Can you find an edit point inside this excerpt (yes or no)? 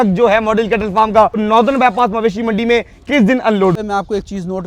yes